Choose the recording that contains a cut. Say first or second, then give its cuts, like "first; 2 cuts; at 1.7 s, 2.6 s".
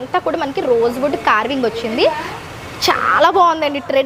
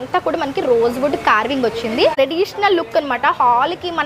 second; 1 cut; at 2.1 s